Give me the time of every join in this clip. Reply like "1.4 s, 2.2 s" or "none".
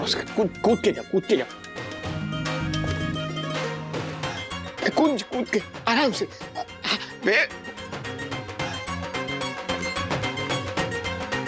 none